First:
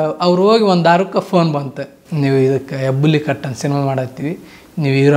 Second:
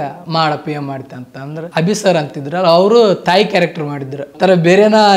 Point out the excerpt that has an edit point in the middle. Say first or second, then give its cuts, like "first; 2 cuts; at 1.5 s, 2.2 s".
second; 2 cuts; at 1.7 s, 4.3 s